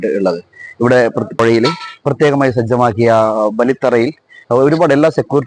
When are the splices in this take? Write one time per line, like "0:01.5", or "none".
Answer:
0:01.3